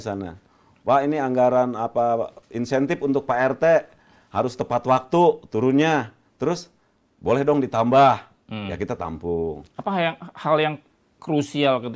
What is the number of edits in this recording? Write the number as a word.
zero